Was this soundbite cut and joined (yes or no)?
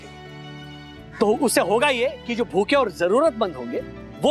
no